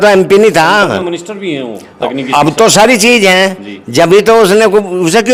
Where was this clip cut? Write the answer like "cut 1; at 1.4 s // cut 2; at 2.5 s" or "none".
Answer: none

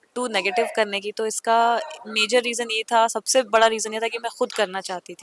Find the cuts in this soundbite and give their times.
none

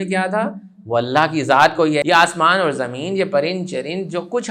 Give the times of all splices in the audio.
cut 1; at 2.0 s

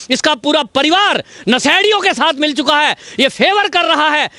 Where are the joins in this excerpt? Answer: none

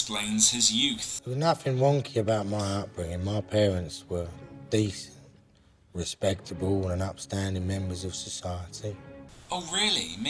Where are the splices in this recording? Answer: cut 1; at 2.3 s

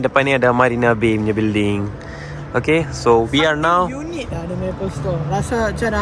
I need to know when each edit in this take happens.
none

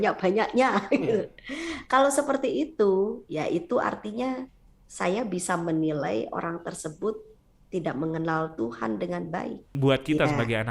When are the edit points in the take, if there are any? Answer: cut 1; at 9.7 s

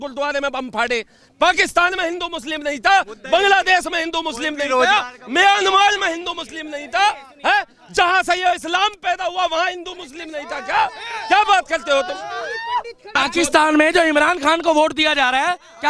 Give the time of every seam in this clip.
cut 1; at 13.1 s

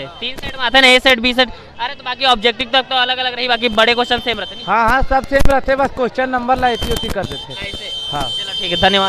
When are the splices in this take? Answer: none

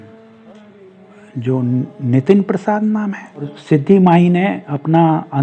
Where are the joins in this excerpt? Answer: cut 1; at 3.5 s

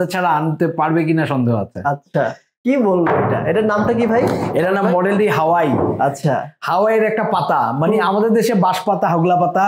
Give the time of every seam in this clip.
cut 1; at 2.5 s

